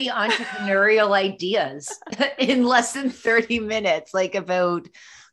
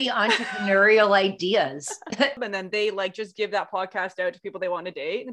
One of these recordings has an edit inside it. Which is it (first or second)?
second